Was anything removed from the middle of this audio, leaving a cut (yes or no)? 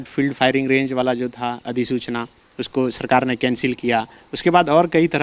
no